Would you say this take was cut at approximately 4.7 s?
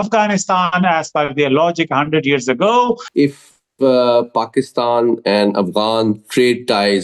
no; 1 cut; at 3.1 s

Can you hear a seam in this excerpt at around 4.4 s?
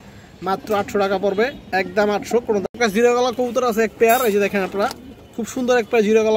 no; 1 cut; at 2.9 s

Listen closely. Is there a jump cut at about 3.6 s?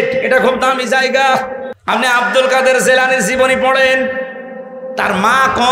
no; 1 cut; at 1.7 s

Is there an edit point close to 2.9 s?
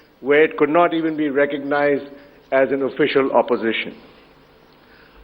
yes; 1 cut; at 2.9 s

